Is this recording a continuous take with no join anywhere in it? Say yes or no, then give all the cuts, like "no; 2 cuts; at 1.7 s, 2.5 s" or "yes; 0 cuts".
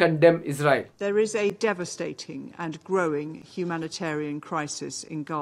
no; 1 cut; at 0.9 s